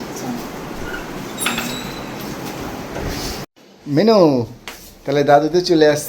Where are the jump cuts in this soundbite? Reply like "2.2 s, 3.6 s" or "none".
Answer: 3.4 s